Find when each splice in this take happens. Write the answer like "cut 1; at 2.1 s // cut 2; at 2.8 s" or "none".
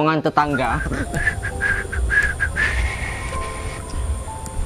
cut 1; at 0.9 s